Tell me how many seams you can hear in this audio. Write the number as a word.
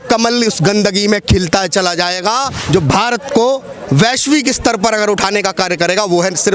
one